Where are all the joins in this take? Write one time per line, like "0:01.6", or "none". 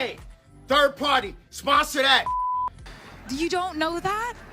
0:02.8